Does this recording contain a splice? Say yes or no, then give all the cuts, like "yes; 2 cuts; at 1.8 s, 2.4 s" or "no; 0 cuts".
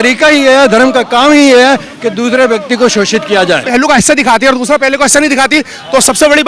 yes; 1 cut; at 3.7 s